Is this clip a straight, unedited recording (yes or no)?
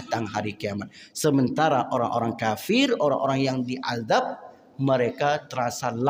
yes